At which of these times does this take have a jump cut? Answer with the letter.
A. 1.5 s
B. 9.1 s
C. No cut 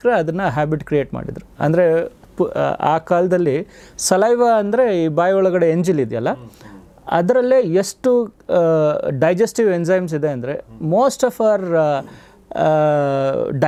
C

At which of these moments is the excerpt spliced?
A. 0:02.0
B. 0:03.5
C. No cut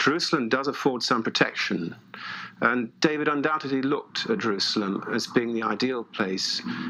A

